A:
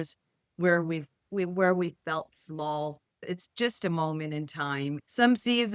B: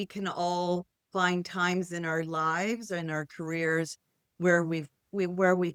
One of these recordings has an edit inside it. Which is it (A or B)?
A